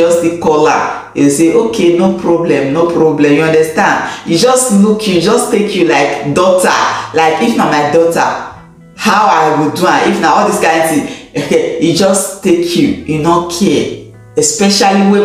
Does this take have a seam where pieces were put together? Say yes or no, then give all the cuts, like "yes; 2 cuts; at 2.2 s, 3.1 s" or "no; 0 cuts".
no; 0 cuts